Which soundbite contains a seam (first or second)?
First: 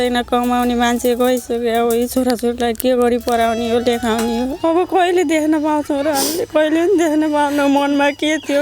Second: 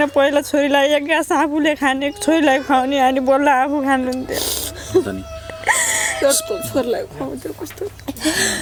first